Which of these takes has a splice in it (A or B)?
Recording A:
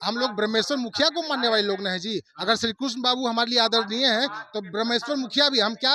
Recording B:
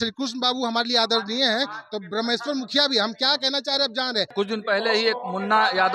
B